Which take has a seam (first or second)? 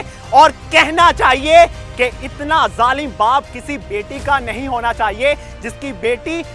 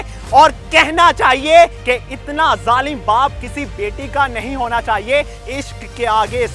second